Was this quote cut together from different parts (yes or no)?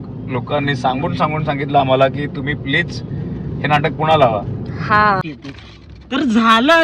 yes